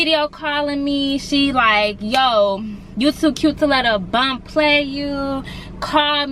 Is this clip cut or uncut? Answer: uncut